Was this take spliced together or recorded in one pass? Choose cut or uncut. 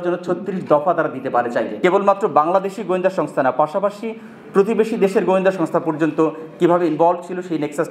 cut